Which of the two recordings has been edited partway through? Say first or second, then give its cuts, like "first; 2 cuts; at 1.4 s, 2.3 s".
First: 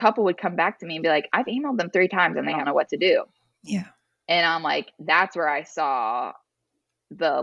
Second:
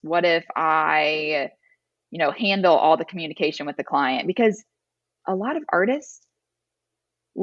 first; 1 cut; at 2.6 s